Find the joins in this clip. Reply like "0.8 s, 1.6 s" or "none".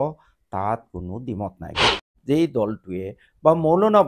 2.1 s